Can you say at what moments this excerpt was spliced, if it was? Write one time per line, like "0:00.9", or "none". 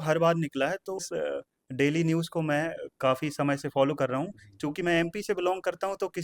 0:01.1